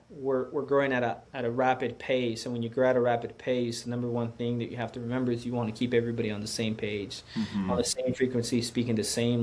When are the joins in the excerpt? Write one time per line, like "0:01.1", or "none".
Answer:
0:01.2

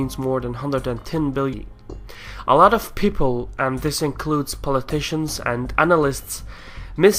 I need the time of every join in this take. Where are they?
none

